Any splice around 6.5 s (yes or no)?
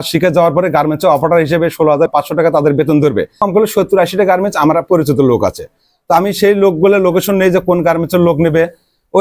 no